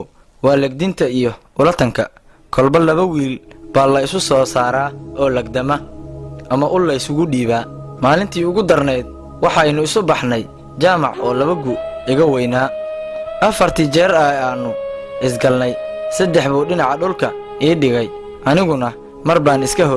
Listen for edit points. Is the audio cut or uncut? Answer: uncut